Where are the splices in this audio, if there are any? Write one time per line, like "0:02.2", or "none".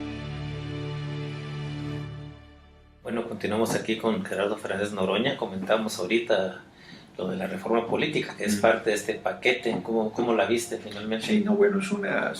0:04.0